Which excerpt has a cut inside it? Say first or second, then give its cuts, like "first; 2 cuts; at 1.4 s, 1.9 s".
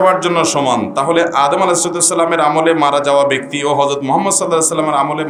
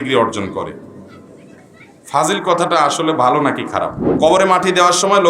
second; 1 cut; at 4.0 s